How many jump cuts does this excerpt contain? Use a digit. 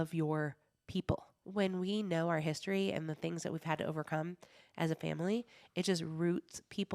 1